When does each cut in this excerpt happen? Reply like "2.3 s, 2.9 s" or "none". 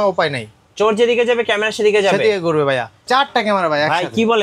3.0 s